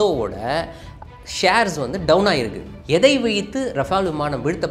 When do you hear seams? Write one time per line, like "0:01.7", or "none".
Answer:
0:02.8